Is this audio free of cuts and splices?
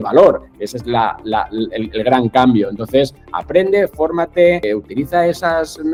yes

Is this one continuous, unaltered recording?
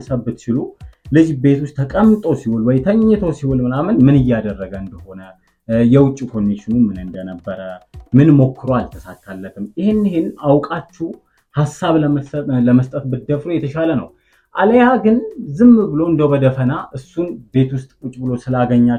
yes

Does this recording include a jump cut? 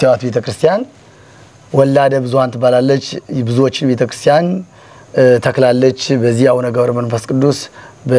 no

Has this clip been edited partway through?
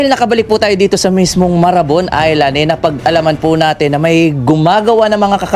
no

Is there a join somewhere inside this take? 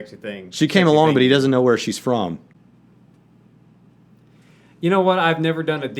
no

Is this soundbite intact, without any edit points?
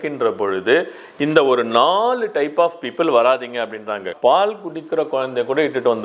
no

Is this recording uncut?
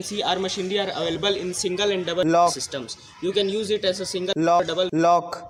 yes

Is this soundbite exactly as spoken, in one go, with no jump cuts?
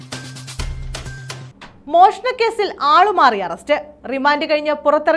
no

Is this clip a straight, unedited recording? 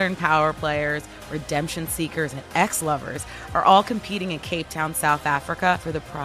yes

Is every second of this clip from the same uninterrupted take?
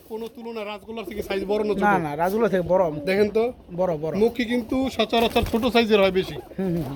yes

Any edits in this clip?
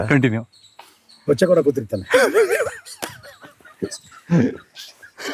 no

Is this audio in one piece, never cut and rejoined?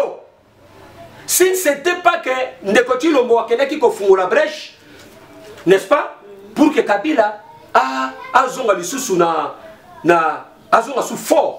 yes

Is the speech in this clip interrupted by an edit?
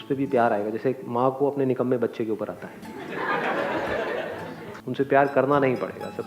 yes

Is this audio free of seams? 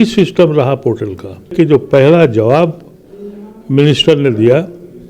no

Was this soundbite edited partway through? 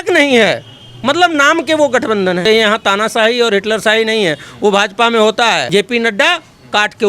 yes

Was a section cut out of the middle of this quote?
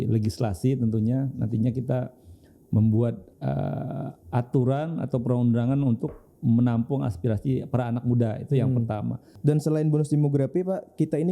yes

